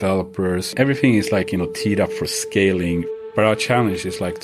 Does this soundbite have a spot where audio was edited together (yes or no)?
yes